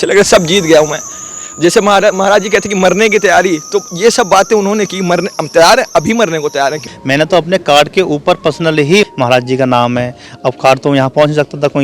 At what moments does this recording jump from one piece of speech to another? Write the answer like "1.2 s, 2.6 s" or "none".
6.9 s, 9.1 s